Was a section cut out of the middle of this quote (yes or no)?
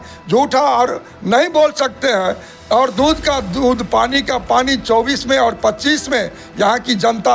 no